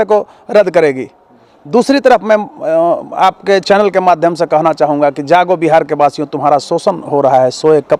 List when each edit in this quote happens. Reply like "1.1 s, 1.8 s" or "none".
none